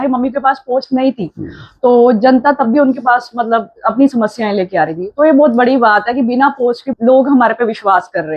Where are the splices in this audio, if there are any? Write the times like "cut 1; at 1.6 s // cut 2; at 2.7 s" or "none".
cut 1; at 6.9 s